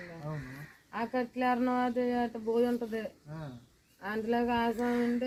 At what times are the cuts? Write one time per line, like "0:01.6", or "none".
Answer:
none

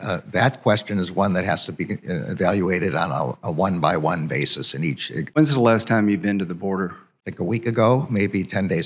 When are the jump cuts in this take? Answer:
0:05.4

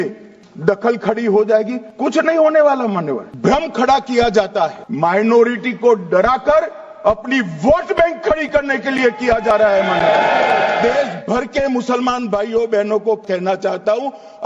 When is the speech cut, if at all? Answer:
0:01.8
0:04.8
0:10.8
0:13.2

